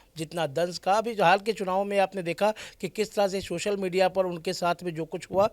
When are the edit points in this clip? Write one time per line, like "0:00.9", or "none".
none